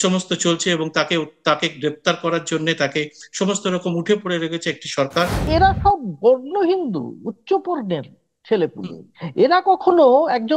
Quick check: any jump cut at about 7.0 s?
no; 1 cut; at 5.4 s

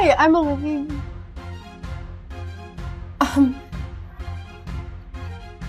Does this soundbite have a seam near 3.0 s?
yes; 2 cuts; at 1.4 s, 3.0 s

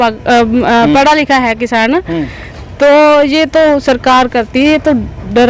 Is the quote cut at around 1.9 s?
no; 0 cuts

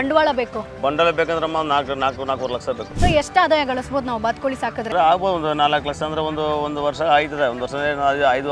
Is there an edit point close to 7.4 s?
no; 2 cuts; at 2.9 s, 4.9 s

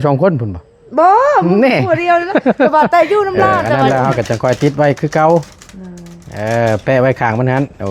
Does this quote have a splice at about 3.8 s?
yes; 1 cut; at 3.8 s

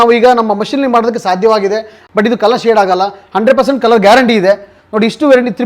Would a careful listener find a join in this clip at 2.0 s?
yes; 1 cut; at 2.0 s

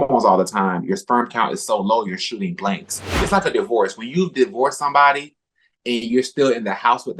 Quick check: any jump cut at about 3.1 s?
yes; 1 cut; at 3.1 s

